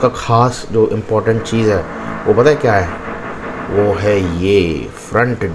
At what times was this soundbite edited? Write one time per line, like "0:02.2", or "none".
none